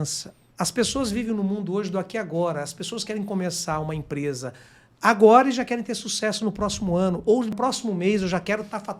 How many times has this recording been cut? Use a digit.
1